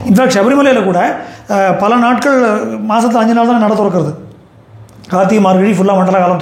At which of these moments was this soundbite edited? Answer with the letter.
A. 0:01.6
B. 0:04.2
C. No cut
C